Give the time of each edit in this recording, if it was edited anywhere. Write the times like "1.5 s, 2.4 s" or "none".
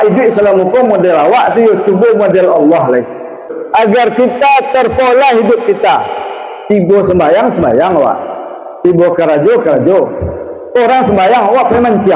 3.4 s